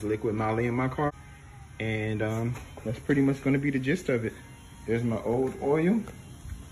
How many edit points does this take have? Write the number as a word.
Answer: one